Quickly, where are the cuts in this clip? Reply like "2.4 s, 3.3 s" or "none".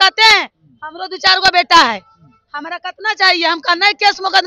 none

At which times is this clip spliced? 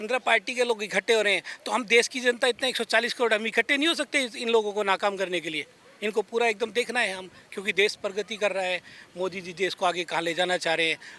none

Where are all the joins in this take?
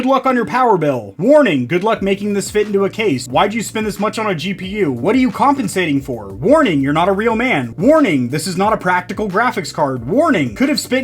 3.2 s, 5.0 s

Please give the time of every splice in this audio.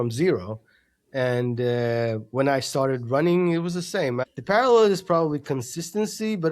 4.2 s

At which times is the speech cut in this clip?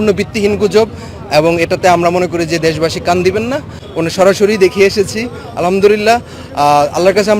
3.8 s

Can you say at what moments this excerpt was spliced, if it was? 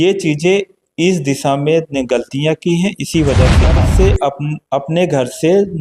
3.7 s

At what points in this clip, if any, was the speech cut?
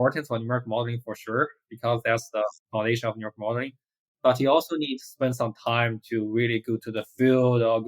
none

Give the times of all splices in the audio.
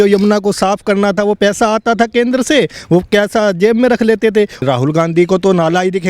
4.6 s

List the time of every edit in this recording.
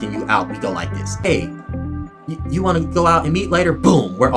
1.2 s

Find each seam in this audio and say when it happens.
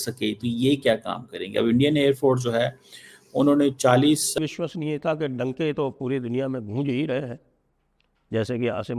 4.4 s

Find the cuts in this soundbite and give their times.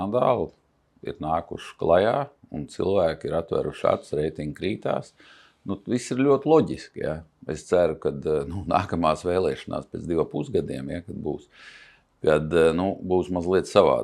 none

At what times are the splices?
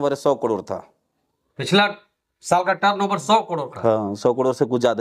none

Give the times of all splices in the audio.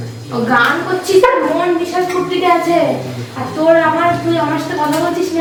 none

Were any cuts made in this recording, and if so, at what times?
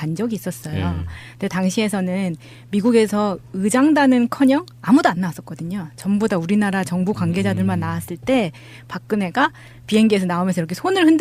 none

